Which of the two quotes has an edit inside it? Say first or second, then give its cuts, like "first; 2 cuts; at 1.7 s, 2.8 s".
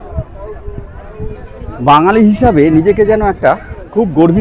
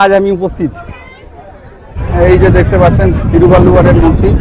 second; 1 cut; at 2.0 s